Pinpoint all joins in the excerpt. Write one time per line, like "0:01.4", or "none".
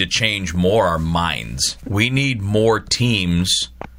0:01.8